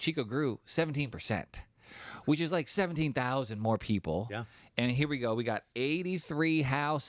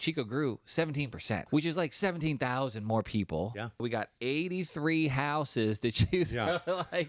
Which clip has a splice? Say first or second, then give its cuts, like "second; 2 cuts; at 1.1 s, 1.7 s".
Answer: second; 2 cuts; at 1.4 s, 3.8 s